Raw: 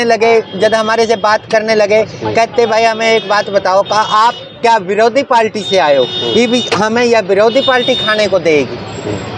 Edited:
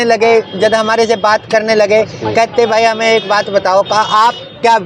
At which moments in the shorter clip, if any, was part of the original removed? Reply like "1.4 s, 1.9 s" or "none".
none